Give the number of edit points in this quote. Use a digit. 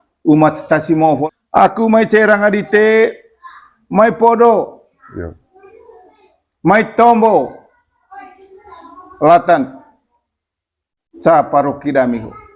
1